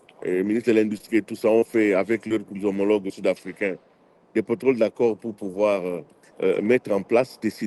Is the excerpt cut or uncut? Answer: uncut